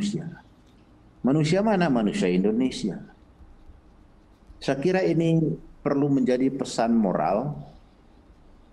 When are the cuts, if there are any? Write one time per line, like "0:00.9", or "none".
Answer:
none

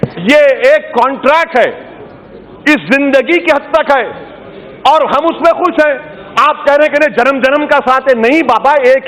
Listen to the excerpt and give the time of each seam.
none

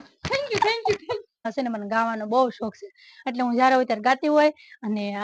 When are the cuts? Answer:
0:01.5

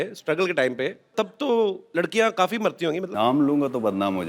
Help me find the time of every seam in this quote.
0:01.1
0:01.8
0:03.1

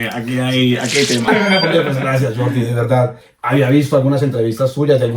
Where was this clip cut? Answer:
0:01.3
0:03.3

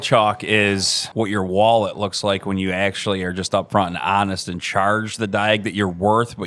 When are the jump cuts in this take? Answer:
0:01.0

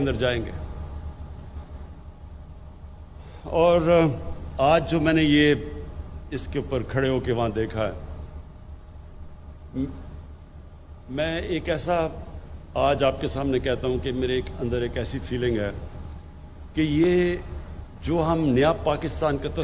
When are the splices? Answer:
none

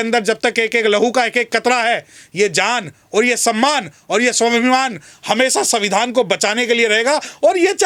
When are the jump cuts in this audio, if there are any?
none

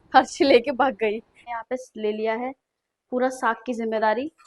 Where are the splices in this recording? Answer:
0:01.4

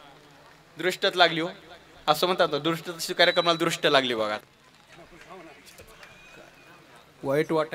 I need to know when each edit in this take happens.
0:04.4

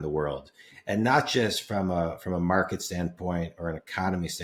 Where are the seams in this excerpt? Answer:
none

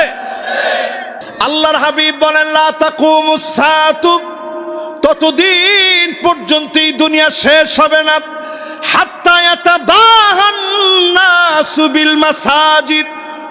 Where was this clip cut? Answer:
0:01.2

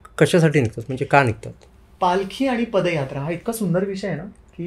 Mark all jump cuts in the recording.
none

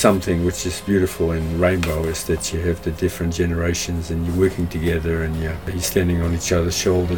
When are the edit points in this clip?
0:05.7

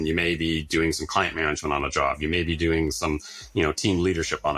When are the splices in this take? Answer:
none

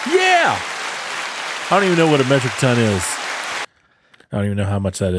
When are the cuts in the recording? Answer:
none

